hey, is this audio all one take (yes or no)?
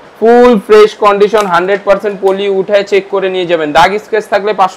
yes